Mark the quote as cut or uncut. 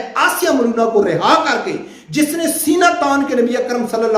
uncut